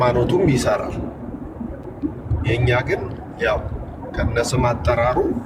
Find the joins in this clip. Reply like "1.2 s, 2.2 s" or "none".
none